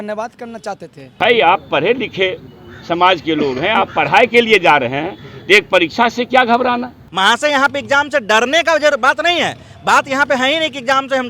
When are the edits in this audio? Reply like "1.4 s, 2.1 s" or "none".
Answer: 1.2 s, 7.0 s